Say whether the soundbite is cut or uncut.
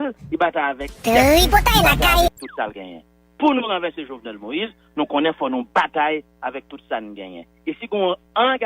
cut